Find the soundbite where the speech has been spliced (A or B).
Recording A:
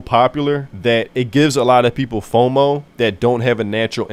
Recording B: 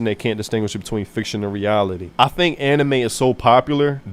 B